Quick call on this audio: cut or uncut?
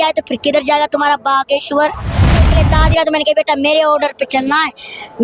cut